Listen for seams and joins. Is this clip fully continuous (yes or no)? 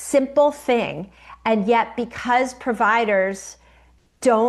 yes